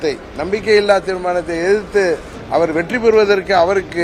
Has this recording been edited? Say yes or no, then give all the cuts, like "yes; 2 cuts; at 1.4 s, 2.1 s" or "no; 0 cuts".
yes; 1 cut; at 2.3 s